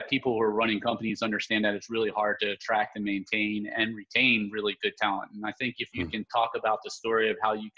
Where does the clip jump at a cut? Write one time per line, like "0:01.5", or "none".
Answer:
none